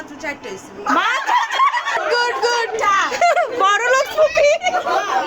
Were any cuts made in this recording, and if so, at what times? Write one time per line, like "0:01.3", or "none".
0:02.0